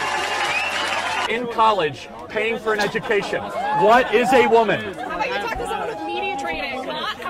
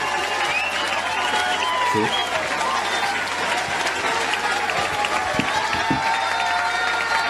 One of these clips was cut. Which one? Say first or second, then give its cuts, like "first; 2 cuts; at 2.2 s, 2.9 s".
first; 1 cut; at 1.3 s